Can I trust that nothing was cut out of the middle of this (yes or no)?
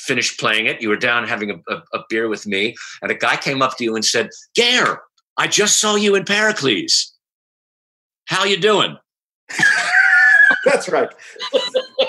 yes